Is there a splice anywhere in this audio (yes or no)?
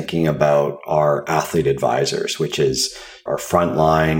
yes